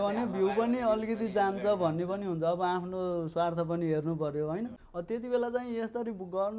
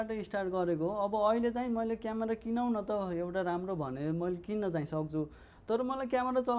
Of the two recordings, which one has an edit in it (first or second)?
first